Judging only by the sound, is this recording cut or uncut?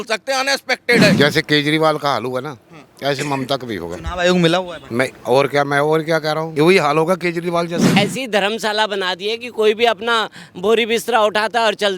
cut